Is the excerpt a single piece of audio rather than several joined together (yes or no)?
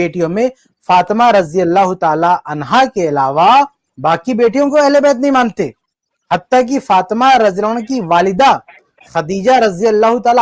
yes